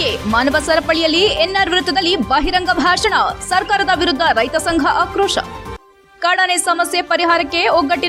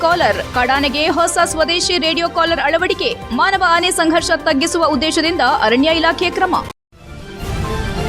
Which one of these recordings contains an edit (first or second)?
second